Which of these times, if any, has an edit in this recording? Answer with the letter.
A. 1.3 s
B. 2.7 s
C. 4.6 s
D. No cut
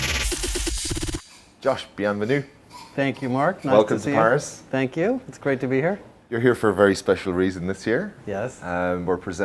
A